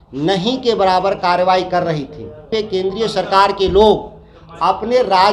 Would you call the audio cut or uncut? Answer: cut